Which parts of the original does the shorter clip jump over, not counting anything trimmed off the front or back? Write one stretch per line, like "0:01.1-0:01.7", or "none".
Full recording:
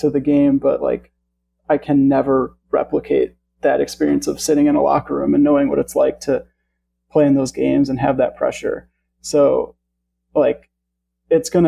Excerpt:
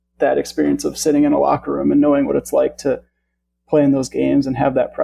none